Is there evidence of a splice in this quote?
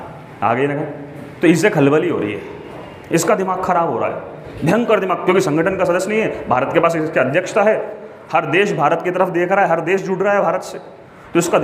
no; 0 cuts

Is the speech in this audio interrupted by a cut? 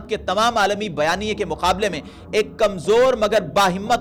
no; 0 cuts

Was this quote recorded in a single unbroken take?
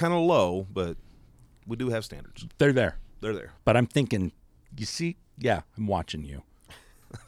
yes; 0 cuts

